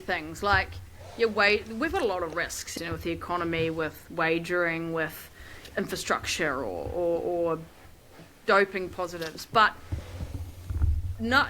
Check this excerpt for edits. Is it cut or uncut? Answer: cut